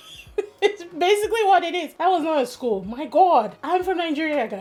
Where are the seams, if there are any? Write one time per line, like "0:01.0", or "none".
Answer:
none